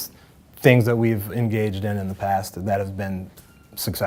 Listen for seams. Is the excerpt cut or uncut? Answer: uncut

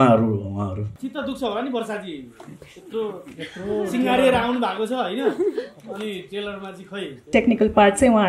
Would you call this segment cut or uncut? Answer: cut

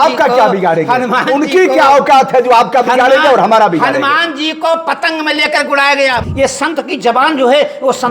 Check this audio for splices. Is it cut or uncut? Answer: cut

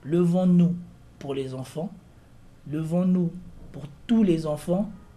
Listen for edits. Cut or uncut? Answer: uncut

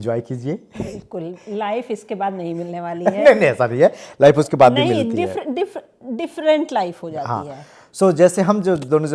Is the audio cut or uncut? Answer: uncut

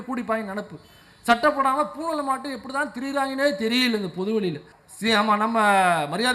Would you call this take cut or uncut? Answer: cut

